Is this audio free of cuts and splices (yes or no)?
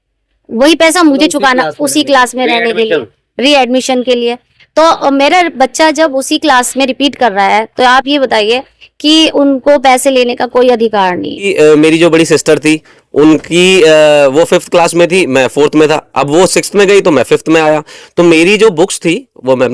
no